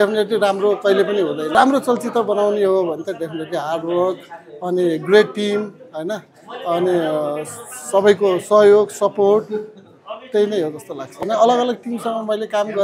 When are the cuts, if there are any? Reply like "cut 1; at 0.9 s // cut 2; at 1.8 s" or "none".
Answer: cut 1; at 1.5 s // cut 2; at 11.2 s

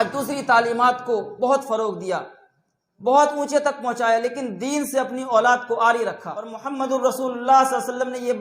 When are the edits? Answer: cut 1; at 6.6 s

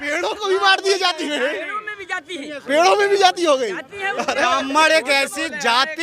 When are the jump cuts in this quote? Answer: none

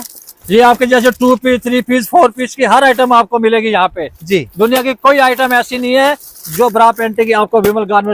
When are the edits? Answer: none

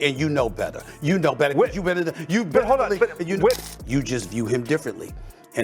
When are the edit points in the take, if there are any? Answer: cut 1; at 3.7 s

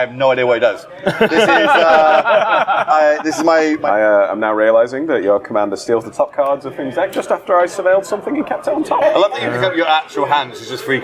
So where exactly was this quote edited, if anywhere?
cut 1; at 3.8 s // cut 2; at 9.0 s

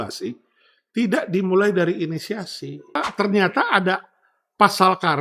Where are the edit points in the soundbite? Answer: cut 1; at 3.0 s

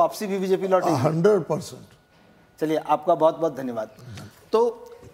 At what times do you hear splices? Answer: none

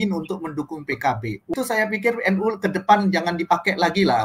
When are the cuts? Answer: cut 1; at 1.5 s

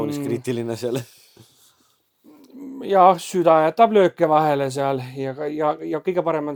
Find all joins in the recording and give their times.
none

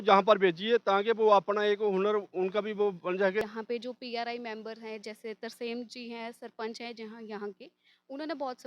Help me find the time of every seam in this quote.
cut 1; at 3.4 s

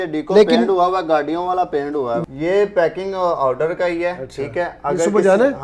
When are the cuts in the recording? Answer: cut 1; at 2.2 s

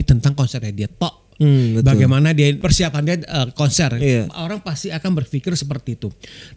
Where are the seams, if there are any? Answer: cut 1; at 2.6 s

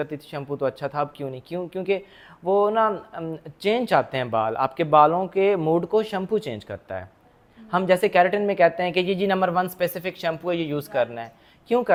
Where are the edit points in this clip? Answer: none

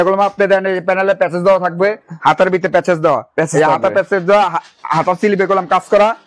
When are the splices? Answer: none

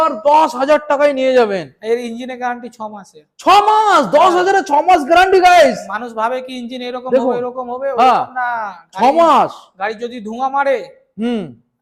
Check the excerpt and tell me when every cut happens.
none

